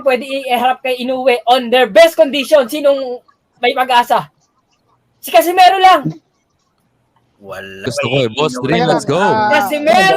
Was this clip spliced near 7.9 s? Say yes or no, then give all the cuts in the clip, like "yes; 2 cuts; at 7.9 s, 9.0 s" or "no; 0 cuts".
yes; 1 cut; at 7.9 s